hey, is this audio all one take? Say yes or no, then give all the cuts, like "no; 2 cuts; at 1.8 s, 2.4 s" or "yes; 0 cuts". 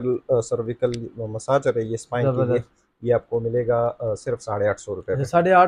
yes; 0 cuts